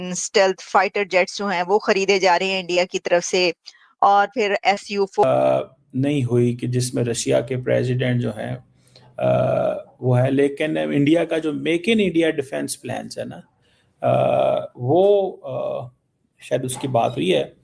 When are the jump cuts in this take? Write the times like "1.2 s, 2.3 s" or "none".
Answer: 5.2 s